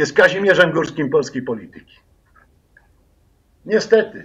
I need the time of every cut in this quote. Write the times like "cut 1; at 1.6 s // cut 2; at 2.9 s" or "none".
none